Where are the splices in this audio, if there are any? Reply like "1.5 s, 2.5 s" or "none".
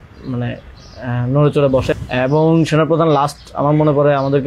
1.9 s